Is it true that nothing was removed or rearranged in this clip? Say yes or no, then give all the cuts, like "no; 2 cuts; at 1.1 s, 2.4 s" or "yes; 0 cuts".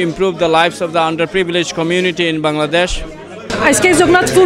no; 1 cut; at 3.4 s